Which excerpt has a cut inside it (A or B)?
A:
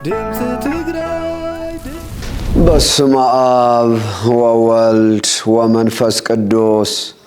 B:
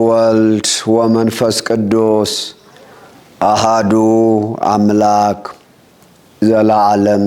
A